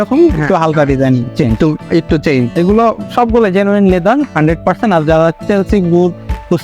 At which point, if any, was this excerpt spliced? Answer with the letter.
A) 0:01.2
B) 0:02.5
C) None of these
B